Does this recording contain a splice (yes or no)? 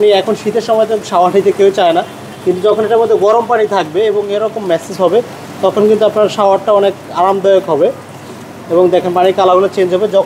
no